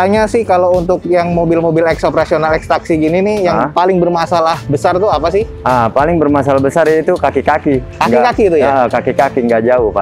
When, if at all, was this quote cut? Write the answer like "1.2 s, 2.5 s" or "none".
none